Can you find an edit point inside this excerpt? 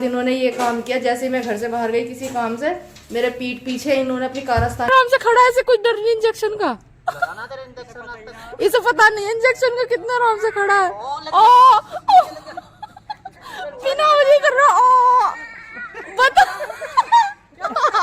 yes; 1 cut; at 4.9 s

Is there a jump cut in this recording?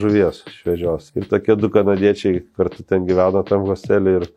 yes; 1 cut; at 1.1 s

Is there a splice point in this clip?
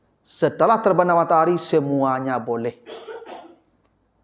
no; 0 cuts

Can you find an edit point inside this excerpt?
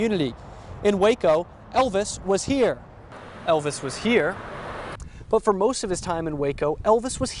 no; 0 cuts

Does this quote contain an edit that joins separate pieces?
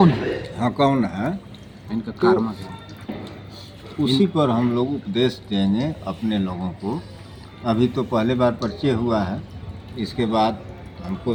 no; 0 cuts

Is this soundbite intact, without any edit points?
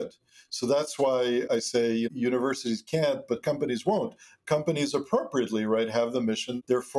yes; 0 cuts

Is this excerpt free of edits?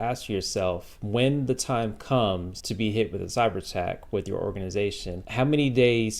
no; 3 cuts; at 0.9 s, 2.6 s, 5.1 s

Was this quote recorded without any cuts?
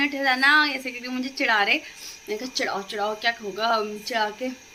yes; 0 cuts

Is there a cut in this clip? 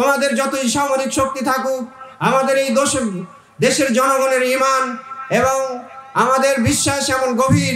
no; 0 cuts

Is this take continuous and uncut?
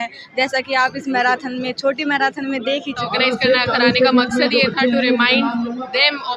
no; 1 cut; at 3.0 s

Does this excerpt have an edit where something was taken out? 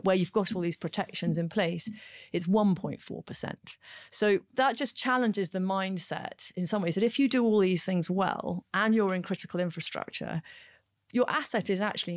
no; 0 cuts

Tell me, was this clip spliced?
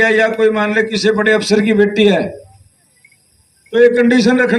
no; 0 cuts

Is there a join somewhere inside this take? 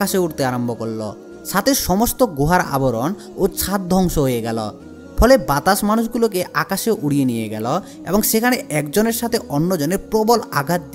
no; 0 cuts

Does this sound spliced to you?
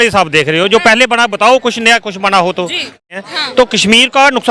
yes; 1 cut; at 3.0 s

